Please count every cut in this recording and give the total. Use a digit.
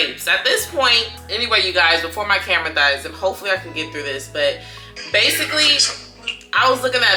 0